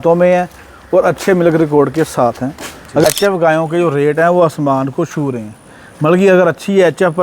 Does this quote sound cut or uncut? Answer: cut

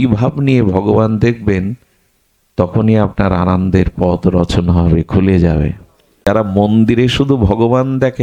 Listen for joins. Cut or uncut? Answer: cut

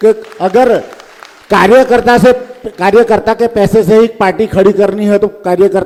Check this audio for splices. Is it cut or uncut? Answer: uncut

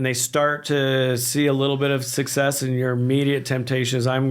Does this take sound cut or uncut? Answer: uncut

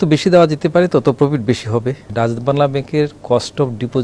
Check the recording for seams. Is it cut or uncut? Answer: cut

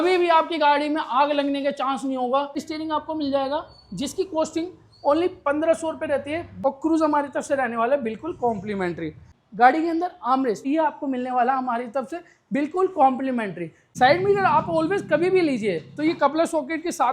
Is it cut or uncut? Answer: cut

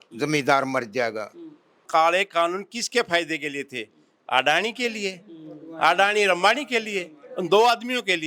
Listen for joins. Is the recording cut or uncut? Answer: cut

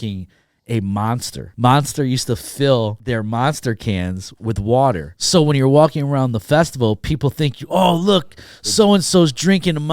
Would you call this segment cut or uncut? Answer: cut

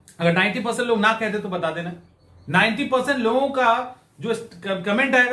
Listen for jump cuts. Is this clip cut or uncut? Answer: uncut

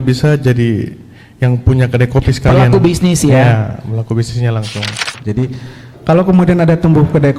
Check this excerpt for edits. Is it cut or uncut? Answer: cut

